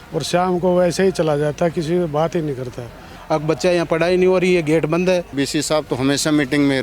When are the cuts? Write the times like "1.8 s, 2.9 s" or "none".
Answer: 3.1 s, 5.3 s